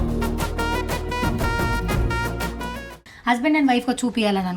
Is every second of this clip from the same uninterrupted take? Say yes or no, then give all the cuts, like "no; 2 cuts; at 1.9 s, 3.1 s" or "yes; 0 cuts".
no; 1 cut; at 3.0 s